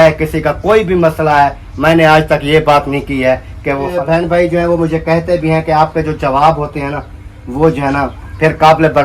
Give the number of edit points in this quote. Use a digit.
1